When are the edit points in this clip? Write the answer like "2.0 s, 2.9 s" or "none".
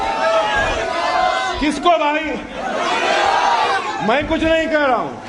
1.4 s